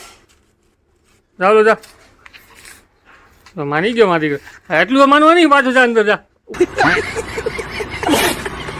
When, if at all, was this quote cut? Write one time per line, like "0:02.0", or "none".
0:06.4